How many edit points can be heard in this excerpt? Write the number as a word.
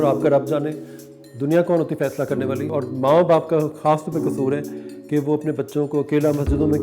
one